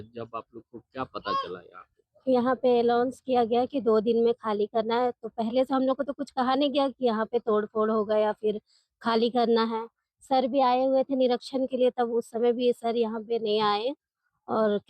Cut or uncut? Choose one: uncut